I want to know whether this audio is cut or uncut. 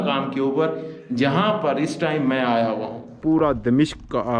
cut